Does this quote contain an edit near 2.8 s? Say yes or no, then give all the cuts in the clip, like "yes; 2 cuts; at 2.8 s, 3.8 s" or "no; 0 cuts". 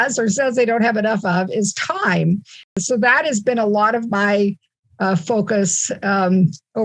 yes; 1 cut; at 2.8 s